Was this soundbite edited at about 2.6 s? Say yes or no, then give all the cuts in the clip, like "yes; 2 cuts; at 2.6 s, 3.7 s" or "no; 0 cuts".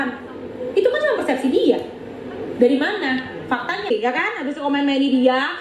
no; 1 cut; at 3.9 s